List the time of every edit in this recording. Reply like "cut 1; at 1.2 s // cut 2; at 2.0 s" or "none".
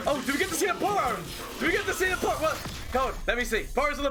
none

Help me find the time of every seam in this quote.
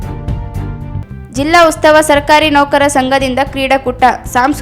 cut 1; at 1.0 s

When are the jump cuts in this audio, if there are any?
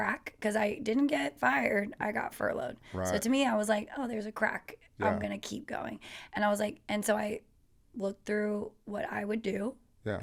none

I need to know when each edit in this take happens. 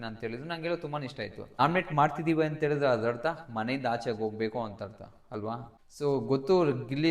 cut 1; at 1.4 s // cut 2; at 5.7 s

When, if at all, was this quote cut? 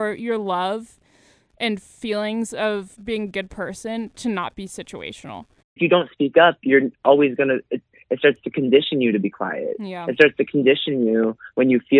cut 1; at 5.8 s

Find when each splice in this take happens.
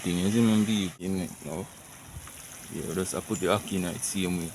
cut 1; at 1.0 s

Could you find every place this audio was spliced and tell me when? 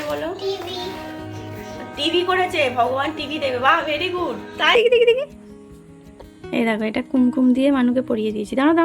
cut 1; at 4.7 s

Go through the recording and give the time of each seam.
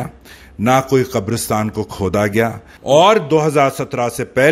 cut 1; at 2.7 s

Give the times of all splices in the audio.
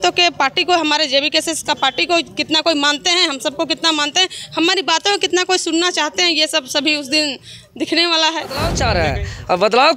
cut 1; at 8.8 s

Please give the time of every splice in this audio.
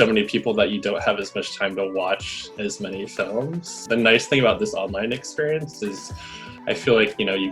cut 1; at 3.8 s

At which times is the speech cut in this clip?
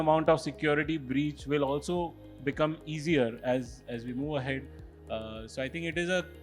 none

